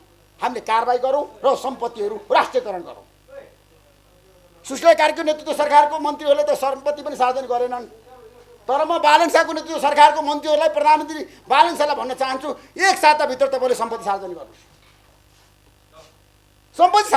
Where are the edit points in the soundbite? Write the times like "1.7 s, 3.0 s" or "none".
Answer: none